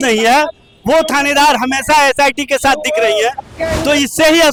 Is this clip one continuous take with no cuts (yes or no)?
yes